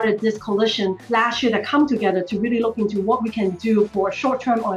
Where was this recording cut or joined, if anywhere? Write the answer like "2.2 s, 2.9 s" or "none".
1.0 s